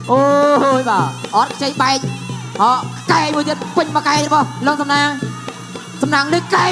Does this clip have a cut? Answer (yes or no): no